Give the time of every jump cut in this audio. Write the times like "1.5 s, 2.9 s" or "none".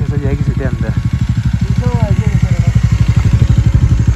none